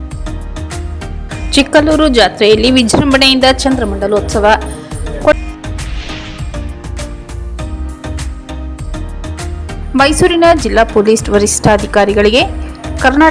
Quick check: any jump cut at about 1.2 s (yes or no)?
yes